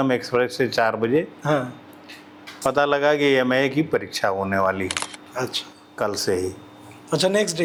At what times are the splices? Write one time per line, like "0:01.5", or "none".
none